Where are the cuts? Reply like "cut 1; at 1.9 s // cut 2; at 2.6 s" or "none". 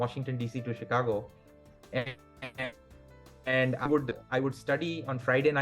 none